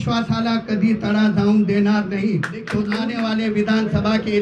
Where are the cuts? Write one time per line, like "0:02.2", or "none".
0:02.9